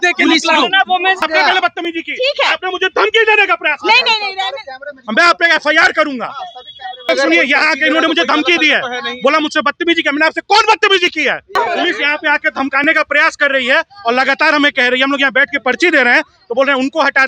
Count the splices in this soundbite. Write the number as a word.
three